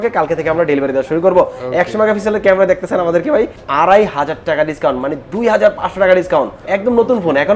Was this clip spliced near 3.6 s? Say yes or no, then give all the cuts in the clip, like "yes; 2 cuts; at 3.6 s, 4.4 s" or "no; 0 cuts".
yes; 1 cut; at 3.6 s